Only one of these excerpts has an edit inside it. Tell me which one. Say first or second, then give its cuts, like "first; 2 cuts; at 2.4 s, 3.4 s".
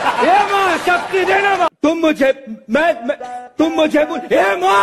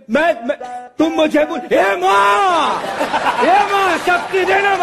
first; 1 cut; at 1.7 s